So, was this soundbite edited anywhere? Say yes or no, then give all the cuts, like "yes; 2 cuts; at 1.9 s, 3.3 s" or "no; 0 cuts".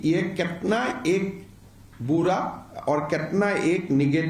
no; 0 cuts